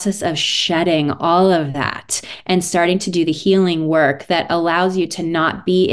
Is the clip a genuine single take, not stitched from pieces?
yes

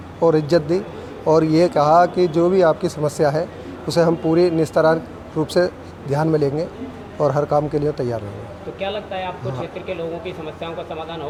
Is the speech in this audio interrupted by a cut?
no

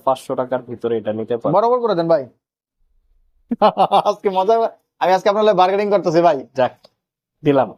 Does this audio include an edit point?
no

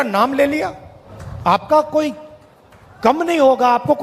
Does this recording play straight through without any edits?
no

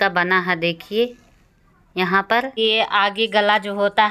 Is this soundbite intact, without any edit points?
no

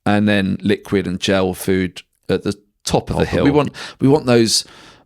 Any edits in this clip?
yes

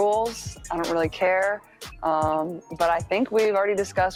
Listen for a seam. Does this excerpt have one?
no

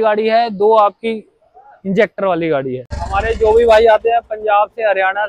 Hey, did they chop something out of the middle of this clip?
yes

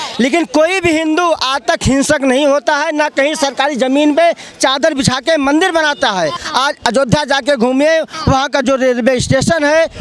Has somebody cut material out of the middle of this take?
yes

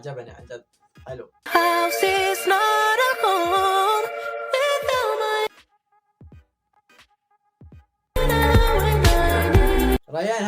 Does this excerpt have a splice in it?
yes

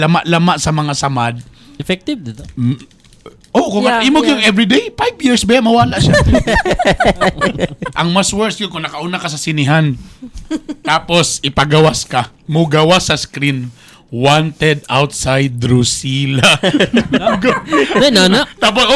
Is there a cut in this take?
yes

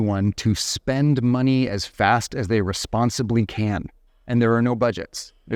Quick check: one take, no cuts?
yes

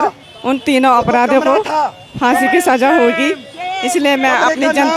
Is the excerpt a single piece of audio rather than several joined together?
yes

